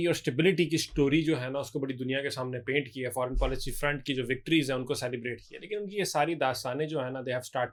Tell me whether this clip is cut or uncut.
uncut